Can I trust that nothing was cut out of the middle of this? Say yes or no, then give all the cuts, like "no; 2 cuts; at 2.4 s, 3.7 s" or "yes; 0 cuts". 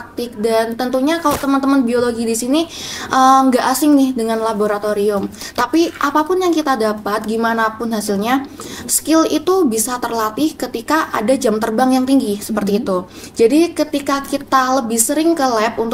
yes; 0 cuts